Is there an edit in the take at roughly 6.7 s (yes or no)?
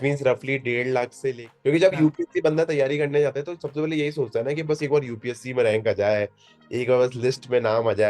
no